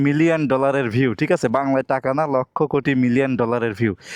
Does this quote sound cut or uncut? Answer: uncut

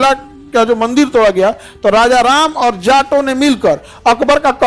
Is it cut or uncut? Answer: uncut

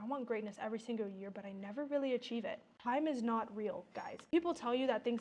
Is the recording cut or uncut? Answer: cut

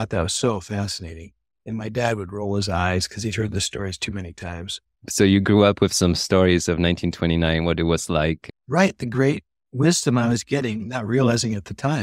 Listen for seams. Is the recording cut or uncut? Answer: cut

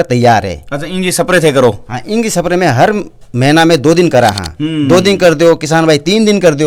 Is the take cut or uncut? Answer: uncut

